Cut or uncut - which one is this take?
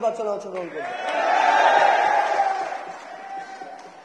uncut